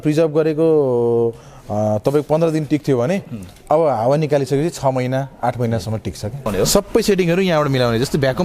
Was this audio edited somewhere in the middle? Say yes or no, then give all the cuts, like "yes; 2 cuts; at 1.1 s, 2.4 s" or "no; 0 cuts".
yes; 1 cut; at 6.5 s